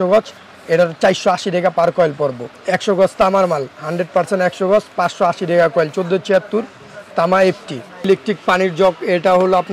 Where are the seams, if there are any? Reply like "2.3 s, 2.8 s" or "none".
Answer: 2.5 s, 7.9 s